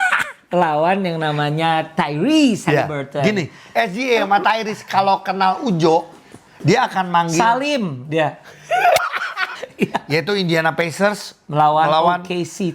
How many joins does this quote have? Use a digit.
1